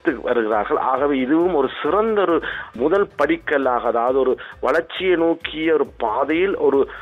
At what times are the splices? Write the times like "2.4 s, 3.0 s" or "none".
2.7 s